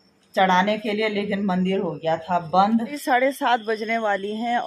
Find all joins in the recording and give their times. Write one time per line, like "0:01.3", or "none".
0:03.0